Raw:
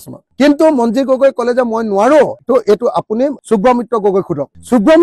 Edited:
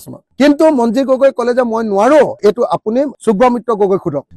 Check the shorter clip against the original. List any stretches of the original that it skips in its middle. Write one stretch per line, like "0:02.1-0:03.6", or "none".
0:02.4-0:02.6